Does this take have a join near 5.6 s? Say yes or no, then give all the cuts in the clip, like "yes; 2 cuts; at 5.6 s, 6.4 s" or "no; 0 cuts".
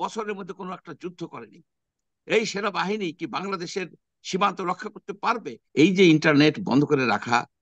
yes; 1 cut; at 5.6 s